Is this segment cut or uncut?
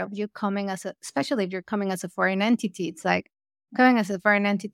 uncut